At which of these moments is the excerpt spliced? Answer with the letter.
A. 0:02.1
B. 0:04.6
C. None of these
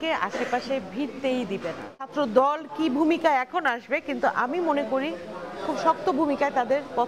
A